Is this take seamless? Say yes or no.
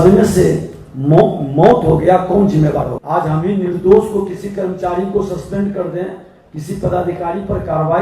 no